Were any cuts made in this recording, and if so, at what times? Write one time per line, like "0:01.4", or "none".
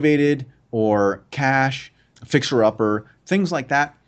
none